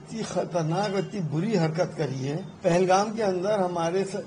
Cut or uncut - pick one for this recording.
cut